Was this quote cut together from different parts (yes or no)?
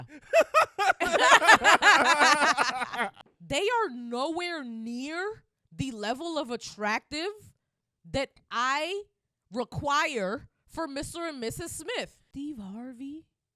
yes